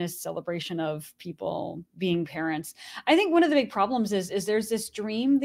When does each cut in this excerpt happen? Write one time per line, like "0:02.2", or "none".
none